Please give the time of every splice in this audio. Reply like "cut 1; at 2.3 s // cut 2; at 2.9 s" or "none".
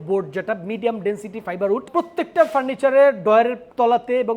cut 1; at 1.9 s